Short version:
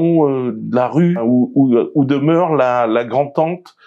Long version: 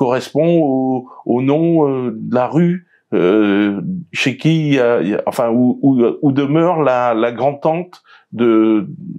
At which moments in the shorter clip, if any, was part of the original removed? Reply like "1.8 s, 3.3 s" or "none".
1.2 s